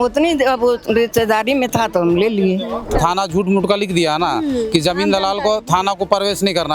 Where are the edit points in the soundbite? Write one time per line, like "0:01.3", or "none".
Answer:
0:03.0